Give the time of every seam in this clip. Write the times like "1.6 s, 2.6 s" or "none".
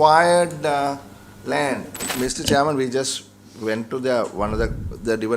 1.9 s